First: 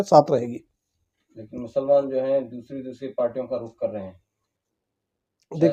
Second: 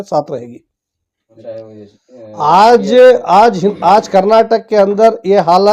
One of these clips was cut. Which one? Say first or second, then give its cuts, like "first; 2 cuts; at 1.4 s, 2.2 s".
second; 1 cut; at 1.3 s